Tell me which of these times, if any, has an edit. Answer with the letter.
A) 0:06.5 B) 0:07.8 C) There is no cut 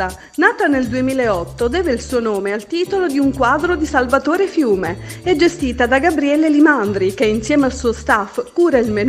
C